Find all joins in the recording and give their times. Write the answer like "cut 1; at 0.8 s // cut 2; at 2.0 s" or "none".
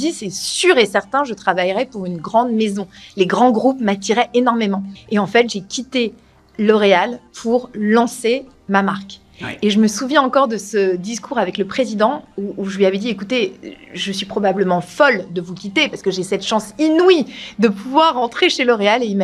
cut 1; at 4.9 s